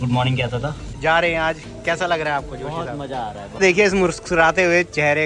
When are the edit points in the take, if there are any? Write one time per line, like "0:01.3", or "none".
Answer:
0:01.0
0:03.4

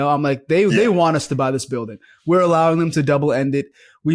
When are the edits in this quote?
none

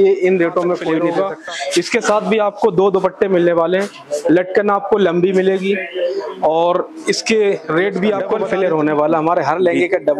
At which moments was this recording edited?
0:01.1
0:08.3

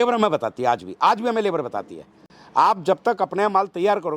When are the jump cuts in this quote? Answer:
0:02.2

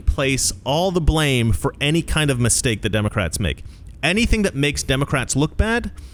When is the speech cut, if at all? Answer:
none

